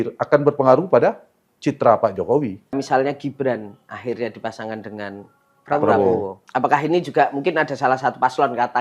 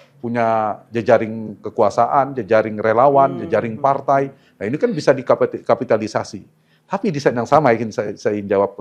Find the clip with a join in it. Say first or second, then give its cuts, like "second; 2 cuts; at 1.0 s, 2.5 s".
first; 2 cuts; at 2.8 s, 6.4 s